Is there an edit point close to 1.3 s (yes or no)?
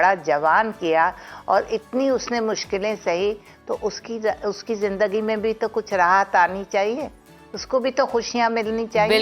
no